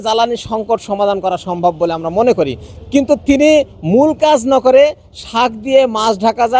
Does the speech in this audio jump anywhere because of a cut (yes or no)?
no